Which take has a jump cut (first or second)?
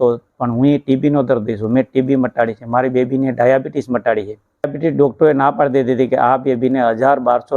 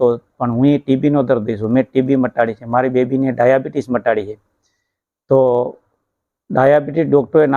first